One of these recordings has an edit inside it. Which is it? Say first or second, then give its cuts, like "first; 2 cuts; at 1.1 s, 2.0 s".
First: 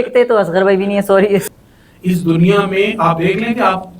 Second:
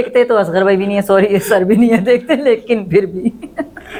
first; 1 cut; at 1.4 s